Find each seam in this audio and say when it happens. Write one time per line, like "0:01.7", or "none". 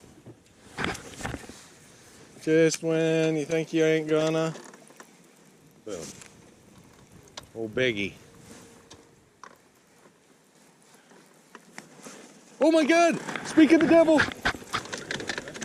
none